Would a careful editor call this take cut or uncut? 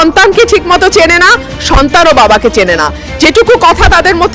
uncut